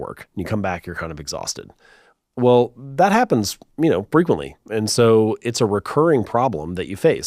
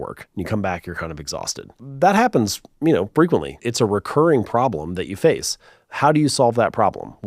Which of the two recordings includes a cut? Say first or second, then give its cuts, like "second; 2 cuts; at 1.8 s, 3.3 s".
second; 2 cuts; at 1.8 s, 3.6 s